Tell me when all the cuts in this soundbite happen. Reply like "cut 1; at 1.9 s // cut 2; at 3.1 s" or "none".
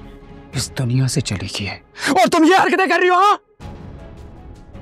none